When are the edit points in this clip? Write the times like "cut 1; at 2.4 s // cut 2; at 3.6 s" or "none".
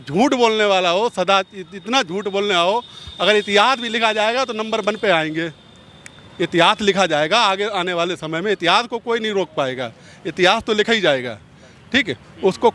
none